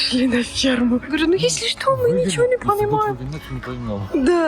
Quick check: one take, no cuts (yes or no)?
no